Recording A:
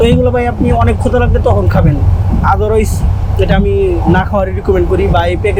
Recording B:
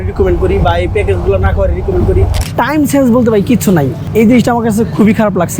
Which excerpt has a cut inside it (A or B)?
B